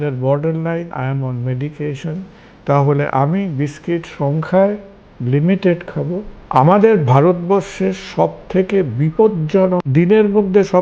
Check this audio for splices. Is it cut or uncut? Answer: cut